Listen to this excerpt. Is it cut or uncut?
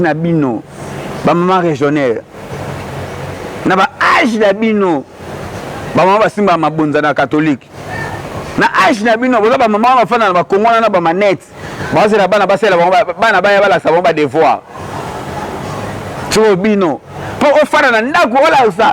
cut